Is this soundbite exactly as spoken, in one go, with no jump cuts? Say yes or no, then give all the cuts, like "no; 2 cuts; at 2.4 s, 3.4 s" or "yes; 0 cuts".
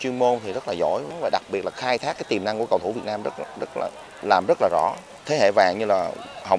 no; 2 cuts; at 1.1 s, 5.1 s